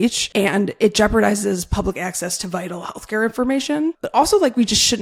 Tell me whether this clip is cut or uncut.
uncut